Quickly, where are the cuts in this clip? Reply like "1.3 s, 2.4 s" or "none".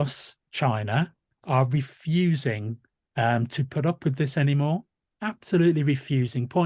1.3 s